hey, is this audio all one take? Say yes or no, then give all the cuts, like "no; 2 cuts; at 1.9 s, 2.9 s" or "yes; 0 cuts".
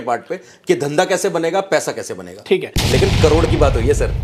no; 1 cut; at 2.7 s